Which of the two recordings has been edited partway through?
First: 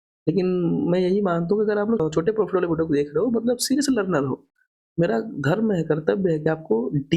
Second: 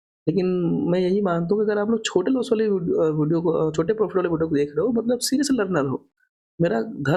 first; 1 cut; at 2.0 s

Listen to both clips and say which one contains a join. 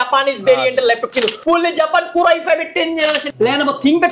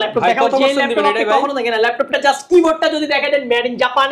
first; 2 cuts; at 1.3 s, 3.3 s

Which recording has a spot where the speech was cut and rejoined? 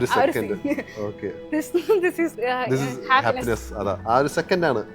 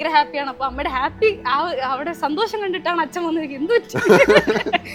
first; 2 cuts; at 2.3 s, 4.0 s

